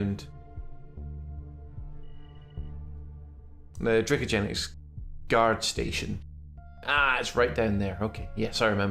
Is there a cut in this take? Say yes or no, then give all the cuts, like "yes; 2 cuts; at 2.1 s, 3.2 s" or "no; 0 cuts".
no; 0 cuts